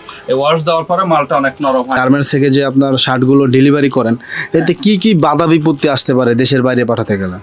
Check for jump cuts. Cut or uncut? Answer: cut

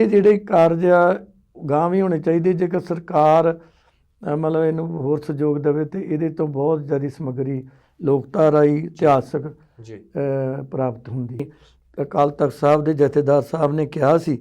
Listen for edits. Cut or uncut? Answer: cut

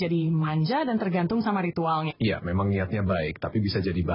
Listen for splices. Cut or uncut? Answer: cut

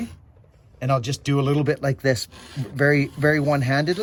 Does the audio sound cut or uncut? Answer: uncut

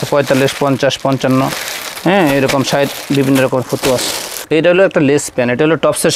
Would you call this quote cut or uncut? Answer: cut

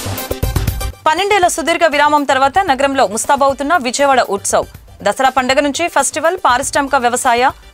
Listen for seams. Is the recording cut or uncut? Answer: cut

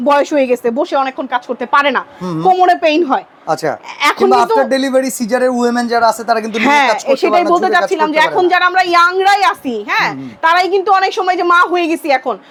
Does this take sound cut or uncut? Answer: uncut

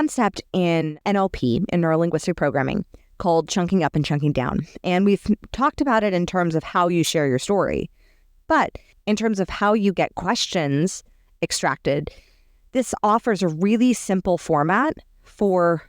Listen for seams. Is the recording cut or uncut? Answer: cut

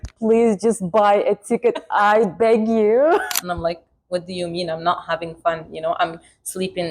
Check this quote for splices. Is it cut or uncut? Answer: cut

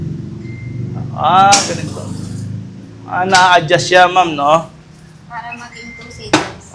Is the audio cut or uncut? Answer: uncut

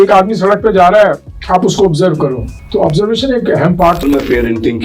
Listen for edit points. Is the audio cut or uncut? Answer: cut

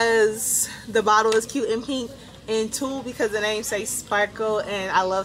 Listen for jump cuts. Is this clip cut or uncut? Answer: uncut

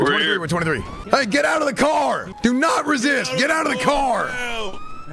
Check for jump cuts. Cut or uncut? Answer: cut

